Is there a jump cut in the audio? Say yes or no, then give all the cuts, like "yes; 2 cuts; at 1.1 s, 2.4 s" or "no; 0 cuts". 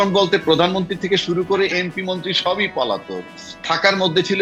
no; 0 cuts